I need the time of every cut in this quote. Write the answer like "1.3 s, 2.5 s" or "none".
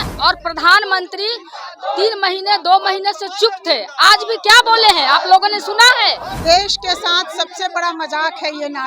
6.3 s